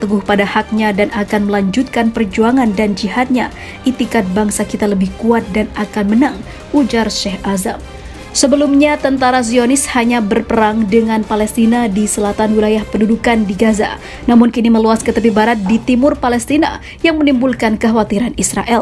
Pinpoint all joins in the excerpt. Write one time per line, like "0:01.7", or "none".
none